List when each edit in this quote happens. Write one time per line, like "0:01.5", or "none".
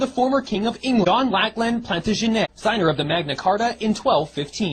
0:01.0
0:02.5